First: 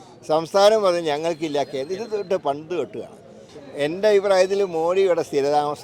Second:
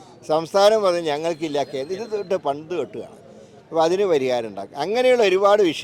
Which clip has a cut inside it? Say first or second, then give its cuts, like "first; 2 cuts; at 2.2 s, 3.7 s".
first; 1 cut; at 3.5 s